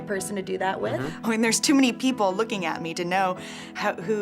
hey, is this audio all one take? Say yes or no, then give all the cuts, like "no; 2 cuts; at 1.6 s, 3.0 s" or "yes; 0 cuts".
no; 1 cut; at 1.1 s